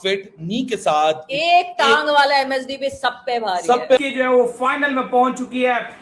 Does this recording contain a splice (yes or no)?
yes